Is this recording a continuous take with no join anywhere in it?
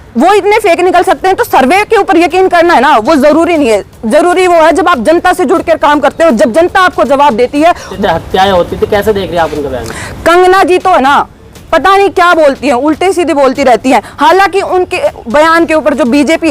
no; 1 cut; at 7.9 s

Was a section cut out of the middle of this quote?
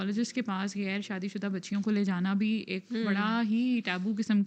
no; 0 cuts

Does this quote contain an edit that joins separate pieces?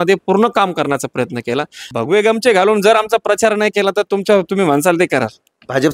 yes; 1 cut; at 1.8 s

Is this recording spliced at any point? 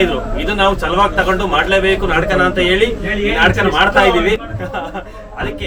no; 0 cuts

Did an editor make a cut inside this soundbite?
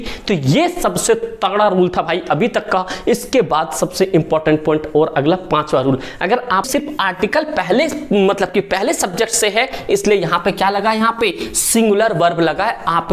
yes; 1 cut; at 6.6 s

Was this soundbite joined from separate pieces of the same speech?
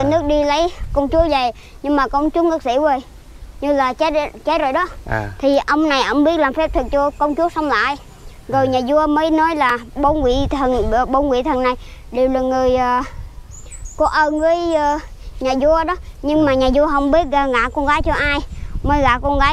no; 0 cuts

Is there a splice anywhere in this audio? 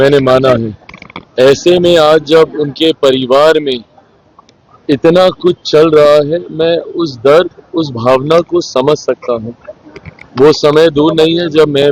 no; 0 cuts

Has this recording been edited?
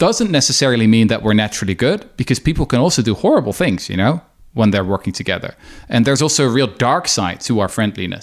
no; 0 cuts

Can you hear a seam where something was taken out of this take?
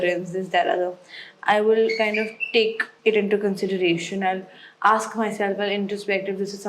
yes; 1 cut; at 2.9 s

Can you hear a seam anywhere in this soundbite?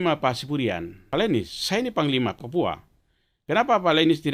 yes; 2 cuts; at 1.1 s, 2.4 s

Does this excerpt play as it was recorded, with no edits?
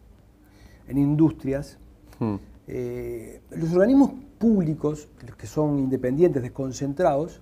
yes; 0 cuts

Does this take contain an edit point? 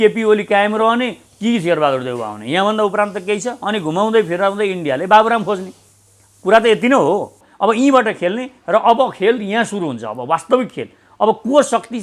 yes; 1 cut; at 7.4 s

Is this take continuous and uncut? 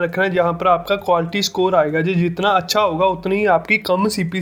yes; 0 cuts

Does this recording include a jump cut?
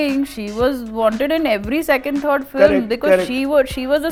no; 0 cuts

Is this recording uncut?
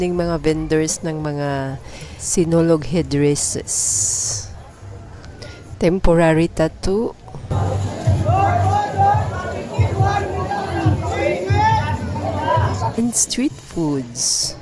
yes; 0 cuts

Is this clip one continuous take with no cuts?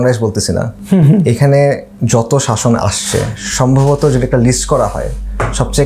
yes; 0 cuts

